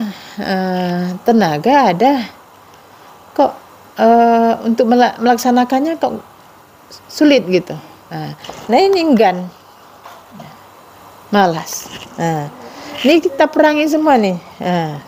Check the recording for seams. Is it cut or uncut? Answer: uncut